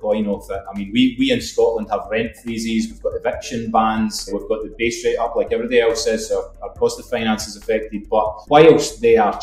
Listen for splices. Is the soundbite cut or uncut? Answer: uncut